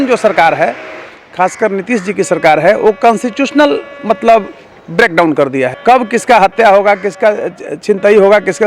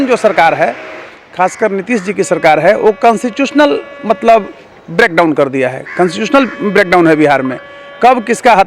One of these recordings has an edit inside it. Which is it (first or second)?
first